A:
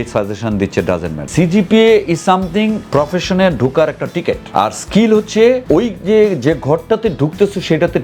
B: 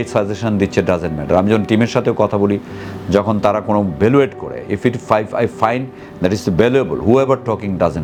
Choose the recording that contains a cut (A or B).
A